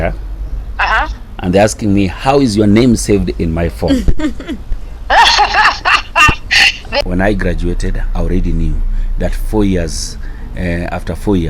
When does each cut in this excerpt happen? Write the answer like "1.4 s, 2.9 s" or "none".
7.0 s